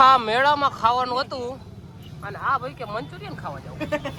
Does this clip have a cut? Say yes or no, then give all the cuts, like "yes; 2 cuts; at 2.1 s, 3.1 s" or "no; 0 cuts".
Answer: no; 0 cuts